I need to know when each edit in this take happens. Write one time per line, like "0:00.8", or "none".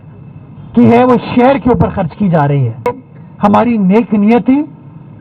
0:02.9